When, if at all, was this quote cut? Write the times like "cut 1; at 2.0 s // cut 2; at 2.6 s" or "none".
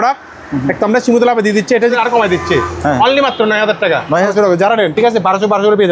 cut 1; at 2.0 s // cut 2; at 4.3 s